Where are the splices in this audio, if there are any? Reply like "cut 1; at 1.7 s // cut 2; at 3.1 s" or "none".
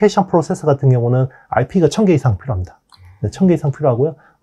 none